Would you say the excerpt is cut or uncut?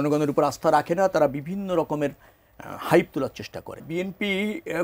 cut